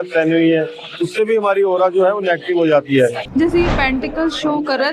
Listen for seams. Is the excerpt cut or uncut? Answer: cut